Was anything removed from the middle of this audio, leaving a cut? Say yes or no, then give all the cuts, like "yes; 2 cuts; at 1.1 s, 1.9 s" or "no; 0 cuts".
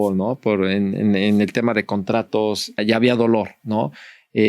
yes; 1 cut; at 2.8 s